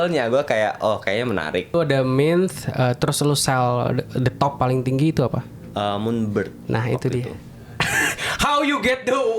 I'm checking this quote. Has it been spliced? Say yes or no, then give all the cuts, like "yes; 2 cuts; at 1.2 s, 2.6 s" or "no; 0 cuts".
yes; 1 cut; at 1.7 s